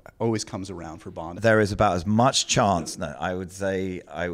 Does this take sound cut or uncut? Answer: cut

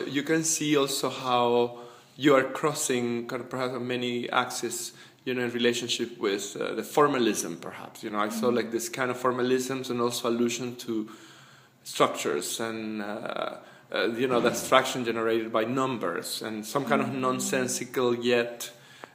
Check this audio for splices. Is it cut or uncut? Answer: cut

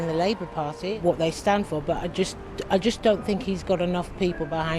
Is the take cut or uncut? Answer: cut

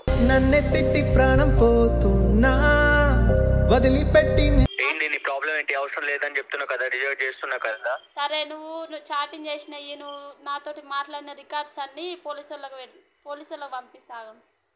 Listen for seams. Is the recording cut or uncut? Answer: uncut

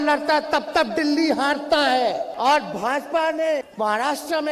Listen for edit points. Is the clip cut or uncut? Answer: cut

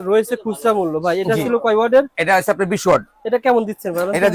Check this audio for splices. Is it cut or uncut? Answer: uncut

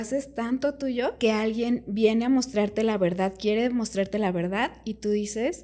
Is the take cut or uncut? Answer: cut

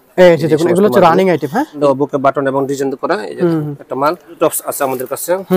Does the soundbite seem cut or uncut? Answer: cut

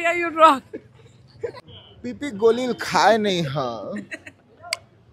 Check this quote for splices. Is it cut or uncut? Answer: cut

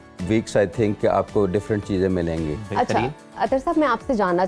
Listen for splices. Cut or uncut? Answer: uncut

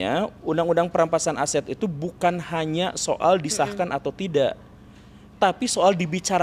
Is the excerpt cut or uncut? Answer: uncut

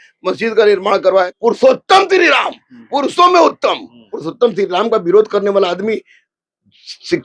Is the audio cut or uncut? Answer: cut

